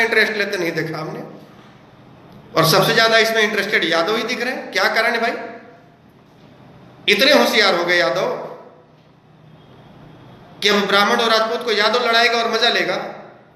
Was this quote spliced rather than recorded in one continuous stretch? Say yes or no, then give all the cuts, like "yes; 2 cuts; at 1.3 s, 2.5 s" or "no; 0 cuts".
no; 0 cuts